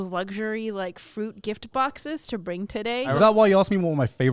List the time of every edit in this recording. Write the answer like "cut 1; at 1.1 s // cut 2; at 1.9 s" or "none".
cut 1; at 3.1 s